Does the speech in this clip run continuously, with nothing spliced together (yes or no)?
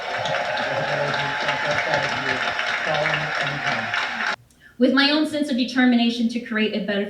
no